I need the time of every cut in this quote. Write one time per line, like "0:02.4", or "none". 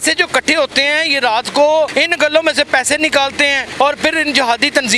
0:01.9
0:03.6